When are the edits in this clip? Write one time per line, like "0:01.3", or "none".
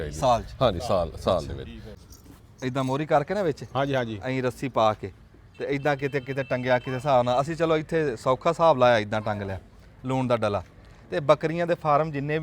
0:01.8